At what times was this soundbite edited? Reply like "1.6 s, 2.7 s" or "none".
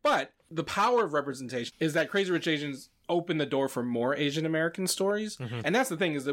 none